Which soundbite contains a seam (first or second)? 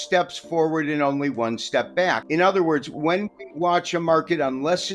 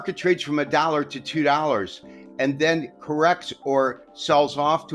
first